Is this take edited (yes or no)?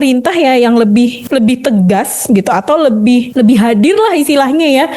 yes